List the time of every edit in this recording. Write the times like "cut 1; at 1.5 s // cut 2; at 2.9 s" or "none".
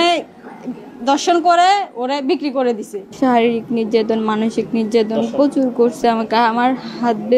cut 1; at 3.1 s